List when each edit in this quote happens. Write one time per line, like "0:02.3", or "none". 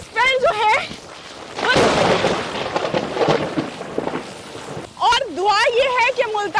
0:04.7